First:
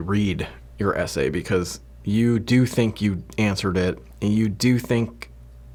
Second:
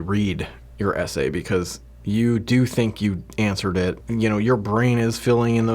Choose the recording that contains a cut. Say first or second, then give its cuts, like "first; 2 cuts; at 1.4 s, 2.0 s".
second; 1 cut; at 4.0 s